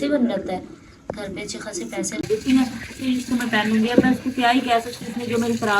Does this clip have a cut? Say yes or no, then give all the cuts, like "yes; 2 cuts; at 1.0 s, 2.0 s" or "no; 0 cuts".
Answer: yes; 1 cut; at 2.2 s